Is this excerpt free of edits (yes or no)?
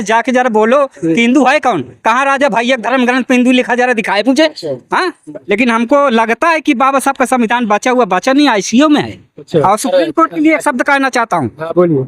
no